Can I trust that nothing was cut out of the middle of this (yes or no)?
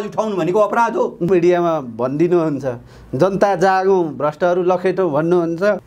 no